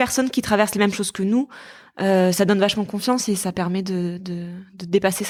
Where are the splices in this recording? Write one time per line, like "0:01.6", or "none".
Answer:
none